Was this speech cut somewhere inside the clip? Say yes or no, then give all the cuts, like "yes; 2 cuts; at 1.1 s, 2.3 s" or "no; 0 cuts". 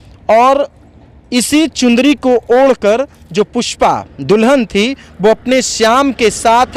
no; 0 cuts